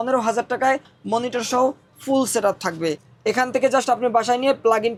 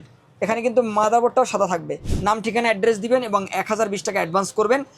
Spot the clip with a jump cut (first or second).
second